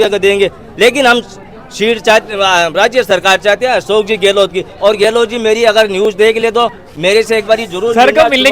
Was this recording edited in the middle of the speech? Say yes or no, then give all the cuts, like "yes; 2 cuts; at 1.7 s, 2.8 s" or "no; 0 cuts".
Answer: no; 0 cuts